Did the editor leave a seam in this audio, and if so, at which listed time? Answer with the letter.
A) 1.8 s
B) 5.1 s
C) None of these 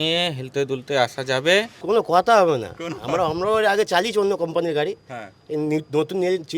A